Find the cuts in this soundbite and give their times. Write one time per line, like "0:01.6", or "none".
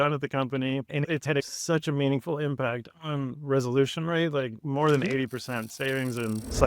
0:01.5